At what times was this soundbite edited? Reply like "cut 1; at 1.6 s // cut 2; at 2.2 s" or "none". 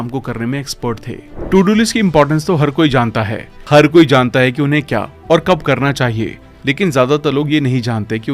cut 1; at 1.2 s